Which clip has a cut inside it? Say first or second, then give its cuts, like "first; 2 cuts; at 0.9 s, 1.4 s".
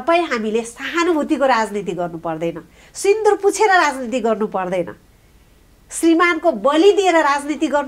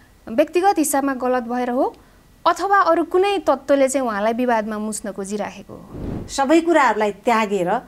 second; 1 cut; at 6.2 s